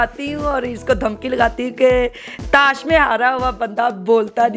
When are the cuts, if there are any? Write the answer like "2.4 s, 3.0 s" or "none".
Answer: none